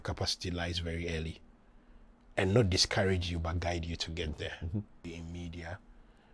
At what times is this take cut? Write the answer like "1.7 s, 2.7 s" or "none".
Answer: 5.0 s